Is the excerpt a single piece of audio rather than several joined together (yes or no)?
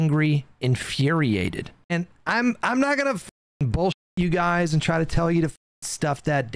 no